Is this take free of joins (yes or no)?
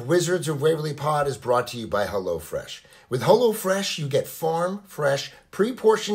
yes